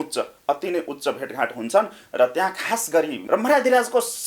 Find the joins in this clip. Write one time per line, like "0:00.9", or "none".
0:03.2